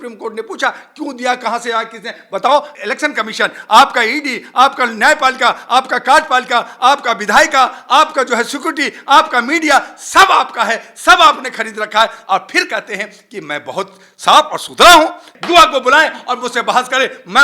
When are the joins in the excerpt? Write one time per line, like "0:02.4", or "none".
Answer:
0:02.7
0:15.3